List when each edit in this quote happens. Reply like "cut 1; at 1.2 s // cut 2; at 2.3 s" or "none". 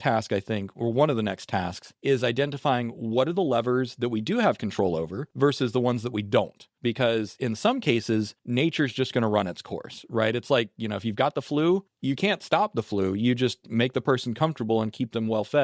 none